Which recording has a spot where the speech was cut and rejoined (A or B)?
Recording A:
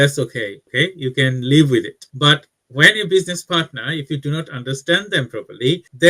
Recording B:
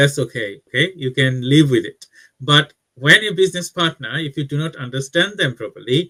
A